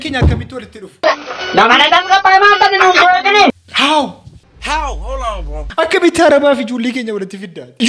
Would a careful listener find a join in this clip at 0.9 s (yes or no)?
no